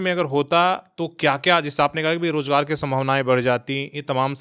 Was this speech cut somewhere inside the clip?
no; 0 cuts

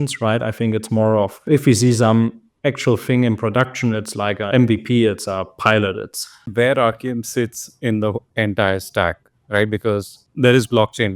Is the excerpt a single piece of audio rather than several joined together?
no; 1 cut; at 6.5 s

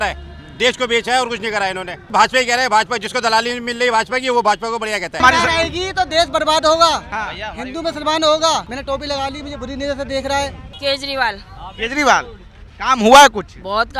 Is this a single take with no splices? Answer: no; 4 cuts; at 2.0 s, 5.2 s, 8.7 s, 10.7 s

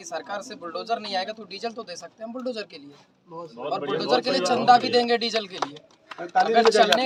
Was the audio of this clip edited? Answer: no; 0 cuts

